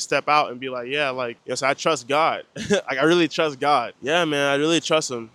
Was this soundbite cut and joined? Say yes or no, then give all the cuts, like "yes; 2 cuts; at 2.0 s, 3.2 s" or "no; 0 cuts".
no; 0 cuts